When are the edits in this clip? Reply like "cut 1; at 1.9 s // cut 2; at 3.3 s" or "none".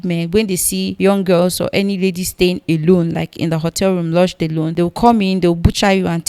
cut 1; at 0.9 s // cut 2; at 4.7 s